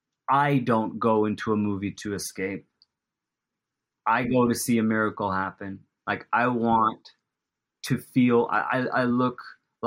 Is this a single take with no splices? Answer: yes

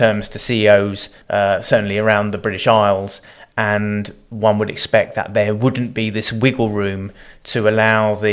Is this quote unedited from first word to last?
no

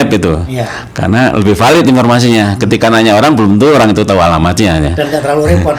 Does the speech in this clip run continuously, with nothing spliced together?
yes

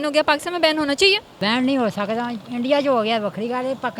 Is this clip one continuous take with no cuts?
no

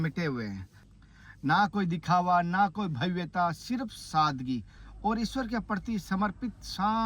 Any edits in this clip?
no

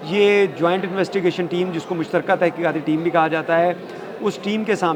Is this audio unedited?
yes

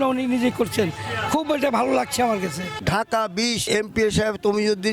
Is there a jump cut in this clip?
yes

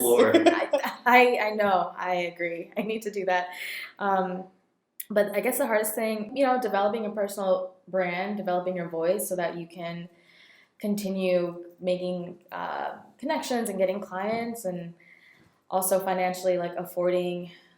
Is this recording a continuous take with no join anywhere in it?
no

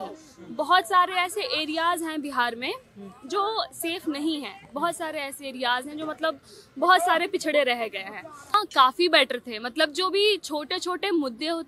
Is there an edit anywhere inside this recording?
yes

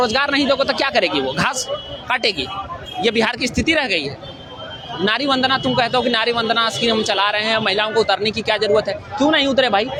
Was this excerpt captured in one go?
yes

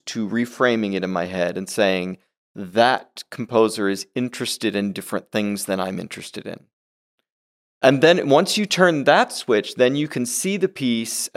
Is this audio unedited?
yes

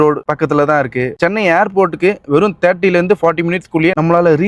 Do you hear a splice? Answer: yes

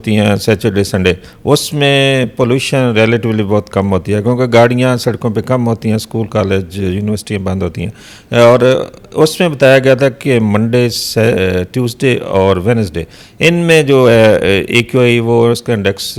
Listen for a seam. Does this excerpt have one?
no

